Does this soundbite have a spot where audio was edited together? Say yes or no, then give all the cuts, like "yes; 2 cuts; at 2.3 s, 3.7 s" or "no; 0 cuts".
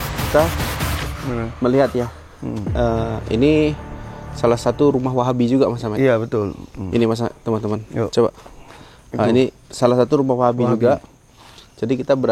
no; 0 cuts